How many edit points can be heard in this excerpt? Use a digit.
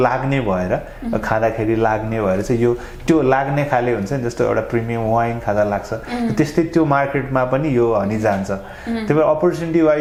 0